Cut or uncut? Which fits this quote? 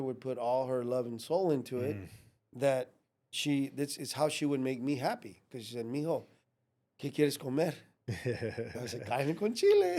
uncut